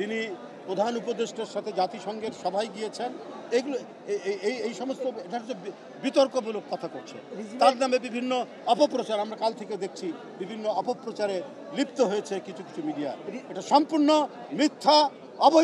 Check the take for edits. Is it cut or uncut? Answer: uncut